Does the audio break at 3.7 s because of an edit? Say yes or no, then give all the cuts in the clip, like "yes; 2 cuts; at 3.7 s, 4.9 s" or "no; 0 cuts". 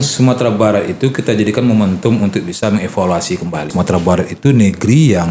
yes; 1 cut; at 3.7 s